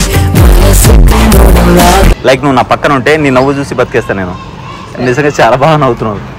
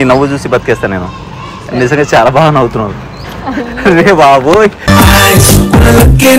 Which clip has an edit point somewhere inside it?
first; 1 cut; at 2.1 s

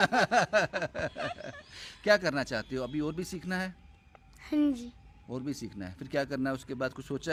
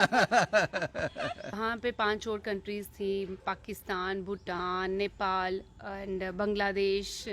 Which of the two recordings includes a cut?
second; 1 cut; at 1.5 s

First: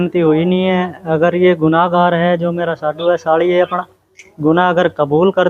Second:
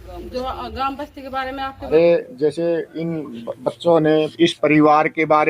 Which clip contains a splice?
second; 1 cut; at 1.9 s

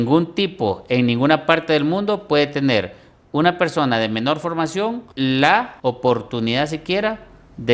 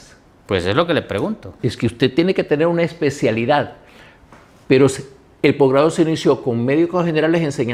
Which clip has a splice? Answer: first; 2 cuts; at 5.1 s, 5.7 s

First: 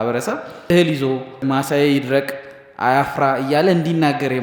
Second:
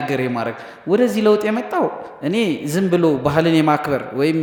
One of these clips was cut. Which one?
first; 2 cuts; at 0.7 s, 1.4 s

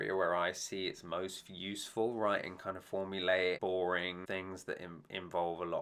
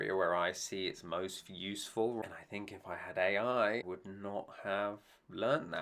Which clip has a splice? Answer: second; 2 cuts; at 2.2 s, 3.9 s

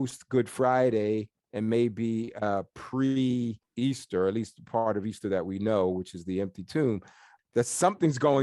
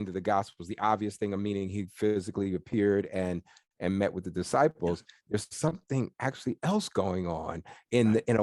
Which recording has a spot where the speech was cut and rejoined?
first; 3 cuts; at 1.4 s, 3.6 s, 7.3 s

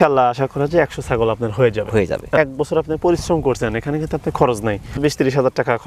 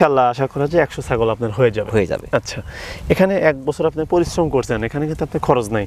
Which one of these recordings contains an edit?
first; 2 cuts; at 2.4 s, 5.0 s

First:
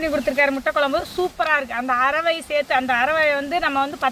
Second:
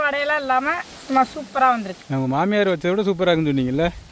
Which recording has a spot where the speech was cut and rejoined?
second; 1 cut; at 2.0 s

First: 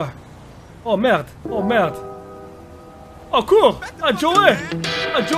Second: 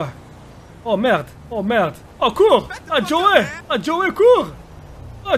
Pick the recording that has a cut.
second; 2 cuts; at 2.0 s, 3.6 s

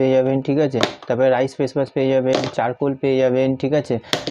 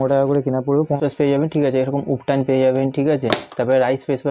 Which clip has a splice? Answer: second; 1 cut; at 1.0 s

